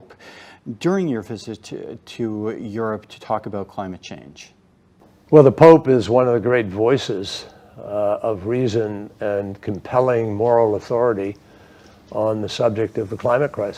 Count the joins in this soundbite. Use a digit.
0